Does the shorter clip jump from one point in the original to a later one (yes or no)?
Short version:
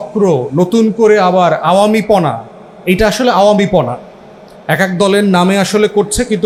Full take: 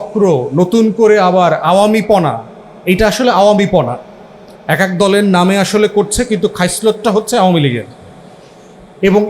no